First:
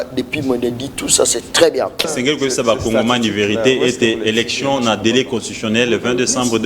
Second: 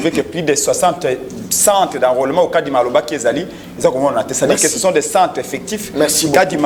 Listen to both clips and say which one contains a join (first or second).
first